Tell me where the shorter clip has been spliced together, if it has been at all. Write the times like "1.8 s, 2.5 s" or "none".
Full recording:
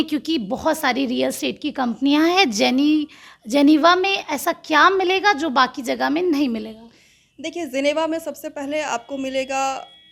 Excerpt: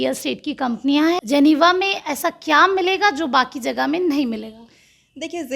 1.2 s